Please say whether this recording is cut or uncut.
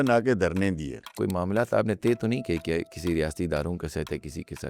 cut